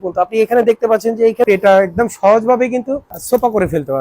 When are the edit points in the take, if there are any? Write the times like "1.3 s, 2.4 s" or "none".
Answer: 1.5 s, 3.2 s